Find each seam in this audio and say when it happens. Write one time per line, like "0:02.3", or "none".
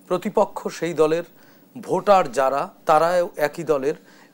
none